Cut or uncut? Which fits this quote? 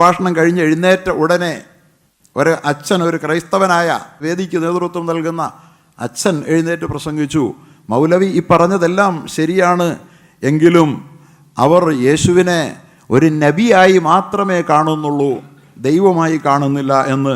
cut